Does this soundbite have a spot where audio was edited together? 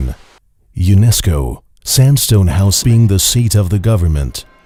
no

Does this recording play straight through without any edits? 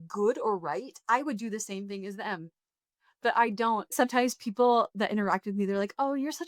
no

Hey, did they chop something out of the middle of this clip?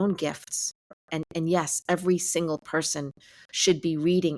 yes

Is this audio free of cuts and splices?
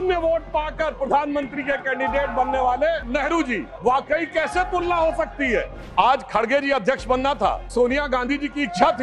no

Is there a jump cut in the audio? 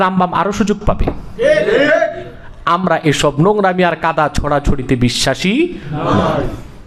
no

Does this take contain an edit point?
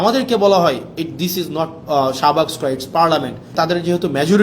yes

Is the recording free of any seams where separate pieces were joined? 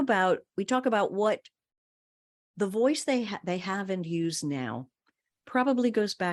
yes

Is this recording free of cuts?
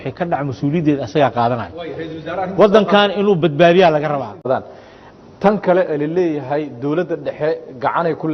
no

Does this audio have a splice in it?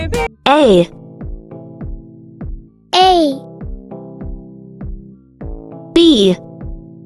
yes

